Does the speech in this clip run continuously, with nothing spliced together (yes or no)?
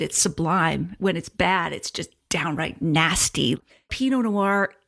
no